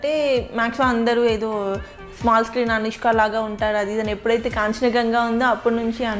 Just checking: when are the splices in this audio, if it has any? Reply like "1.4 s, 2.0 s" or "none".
none

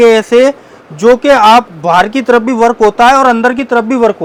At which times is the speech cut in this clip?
none

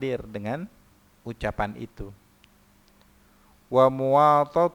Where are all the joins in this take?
none

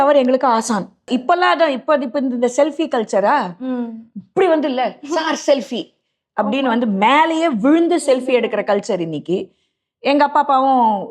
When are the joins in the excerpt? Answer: 1.1 s

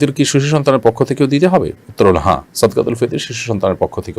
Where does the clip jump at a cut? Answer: none

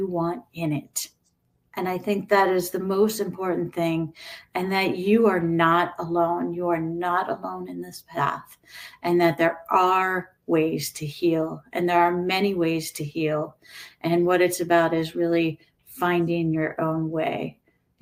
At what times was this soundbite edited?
none

